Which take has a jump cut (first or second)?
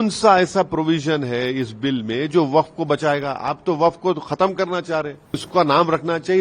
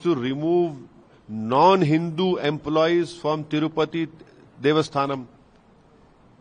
first